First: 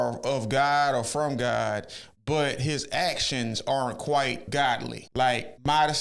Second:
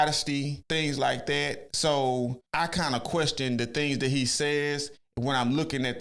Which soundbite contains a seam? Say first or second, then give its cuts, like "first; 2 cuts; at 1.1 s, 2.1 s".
first; 1 cut; at 4.5 s